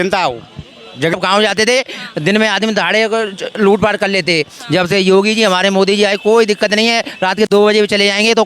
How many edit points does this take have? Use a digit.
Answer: 1